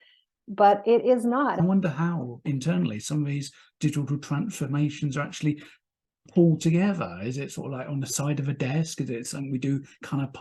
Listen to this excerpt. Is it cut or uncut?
cut